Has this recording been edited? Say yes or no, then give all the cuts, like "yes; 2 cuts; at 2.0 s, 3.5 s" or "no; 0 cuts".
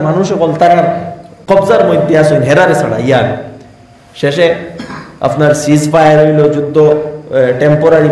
yes; 1 cut; at 1.3 s